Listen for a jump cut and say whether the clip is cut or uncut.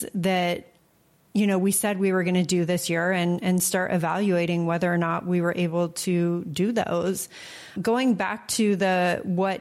cut